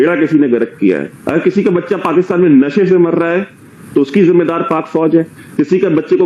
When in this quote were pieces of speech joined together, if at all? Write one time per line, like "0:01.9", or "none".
0:01.1